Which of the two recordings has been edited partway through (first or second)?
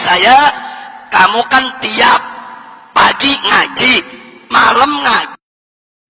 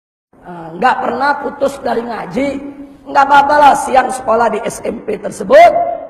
first